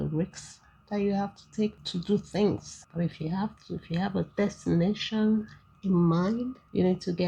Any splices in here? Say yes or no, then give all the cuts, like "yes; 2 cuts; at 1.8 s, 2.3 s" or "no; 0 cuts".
yes; 1 cut; at 2.8 s